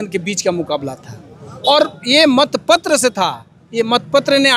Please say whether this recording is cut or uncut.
uncut